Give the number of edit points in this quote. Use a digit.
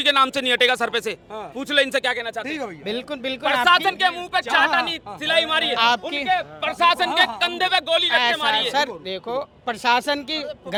0